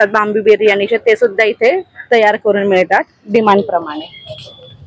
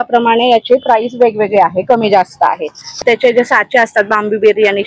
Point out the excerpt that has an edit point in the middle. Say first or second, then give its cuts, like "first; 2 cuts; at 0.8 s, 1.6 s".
second; 1 cut; at 3.0 s